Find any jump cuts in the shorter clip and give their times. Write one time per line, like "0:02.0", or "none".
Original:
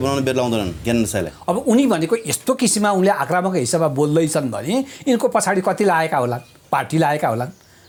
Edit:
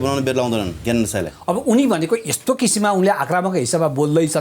none